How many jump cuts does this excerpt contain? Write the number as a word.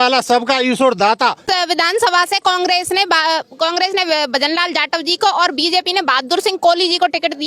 one